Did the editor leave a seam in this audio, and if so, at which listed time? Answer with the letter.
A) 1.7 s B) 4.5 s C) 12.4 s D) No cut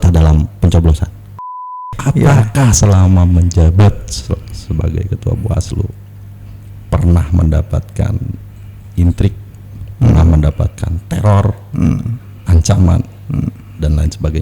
A